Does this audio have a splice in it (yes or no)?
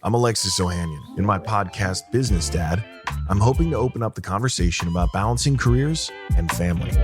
yes